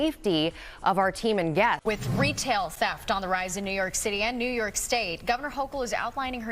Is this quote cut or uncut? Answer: cut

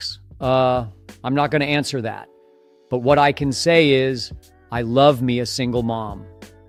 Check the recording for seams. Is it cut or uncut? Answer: uncut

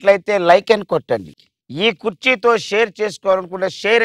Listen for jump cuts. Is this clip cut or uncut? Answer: uncut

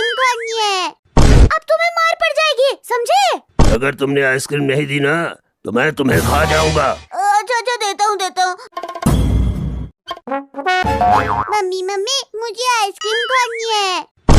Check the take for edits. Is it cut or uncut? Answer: cut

